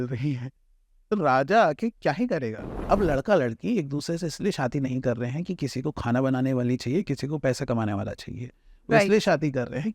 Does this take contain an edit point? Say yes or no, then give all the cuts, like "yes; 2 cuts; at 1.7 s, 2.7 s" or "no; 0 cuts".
yes; 1 cut; at 2.8 s